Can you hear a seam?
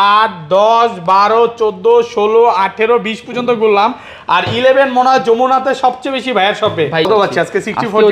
yes; 1 cut; at 7.1 s

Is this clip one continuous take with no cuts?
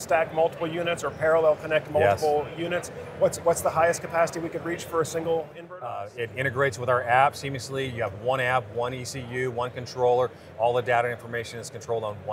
no; 1 cut; at 5.6 s

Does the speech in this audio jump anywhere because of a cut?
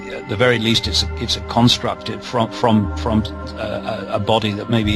no; 0 cuts

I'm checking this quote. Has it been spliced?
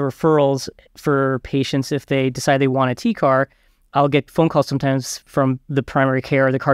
yes; 2 cuts; at 3.9 s, 5.6 s

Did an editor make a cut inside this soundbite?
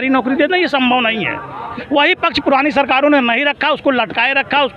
yes; 1 cut; at 1.7 s

